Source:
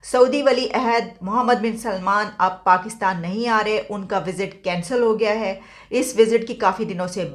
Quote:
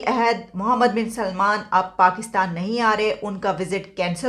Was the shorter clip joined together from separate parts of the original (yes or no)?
no